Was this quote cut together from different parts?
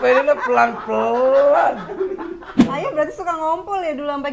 yes; 1 cut; at 2.5 s

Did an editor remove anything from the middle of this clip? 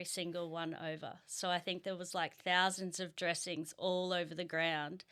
no; 0 cuts

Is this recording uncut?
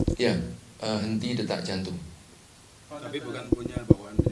yes; 0 cuts

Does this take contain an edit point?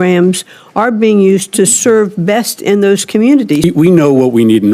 yes; 1 cut; at 3.6 s

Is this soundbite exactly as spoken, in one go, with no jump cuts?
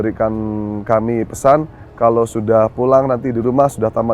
yes; 0 cuts

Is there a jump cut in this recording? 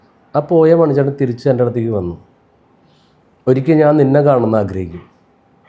no; 0 cuts

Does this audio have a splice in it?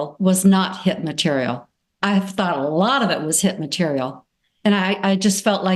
no; 0 cuts

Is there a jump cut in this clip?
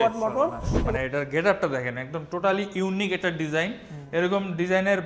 yes; 1 cut; at 0.9 s

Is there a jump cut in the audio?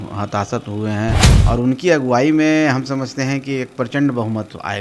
yes; 1 cut; at 1.3 s

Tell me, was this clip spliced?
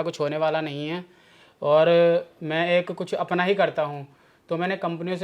no; 0 cuts

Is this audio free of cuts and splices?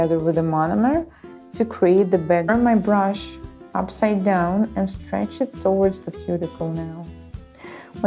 yes; 0 cuts

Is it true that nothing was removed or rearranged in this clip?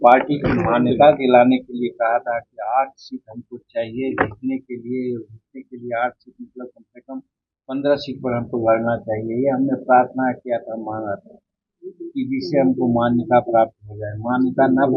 yes; 0 cuts

